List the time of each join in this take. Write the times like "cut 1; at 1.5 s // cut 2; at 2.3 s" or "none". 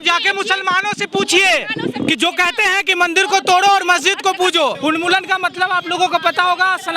cut 1; at 4.8 s